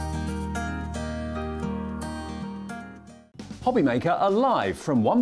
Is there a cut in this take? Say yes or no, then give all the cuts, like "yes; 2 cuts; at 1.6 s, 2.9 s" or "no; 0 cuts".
yes; 1 cut; at 3.2 s